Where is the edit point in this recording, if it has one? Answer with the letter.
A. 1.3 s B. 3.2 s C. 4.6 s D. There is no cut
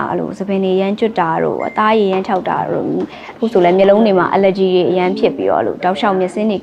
D